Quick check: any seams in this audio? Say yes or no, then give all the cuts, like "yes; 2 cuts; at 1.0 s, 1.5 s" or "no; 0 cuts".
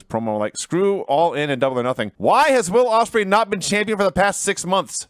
yes; 1 cut; at 2.1 s